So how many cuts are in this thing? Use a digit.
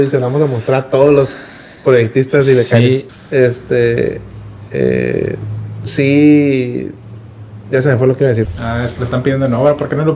2